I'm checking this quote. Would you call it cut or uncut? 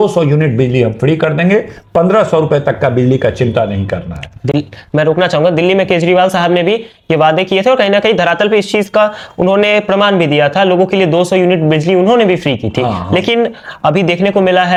uncut